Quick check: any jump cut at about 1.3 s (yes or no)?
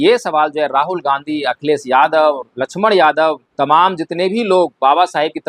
no